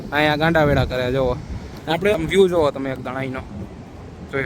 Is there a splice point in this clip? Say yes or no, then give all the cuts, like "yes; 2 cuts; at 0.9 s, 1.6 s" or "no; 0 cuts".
yes; 1 cut; at 2.2 s